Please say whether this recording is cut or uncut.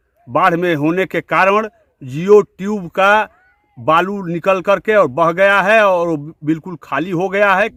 uncut